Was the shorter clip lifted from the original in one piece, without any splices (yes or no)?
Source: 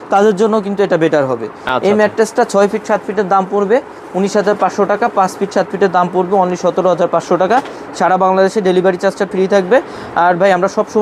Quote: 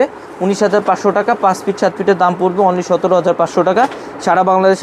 yes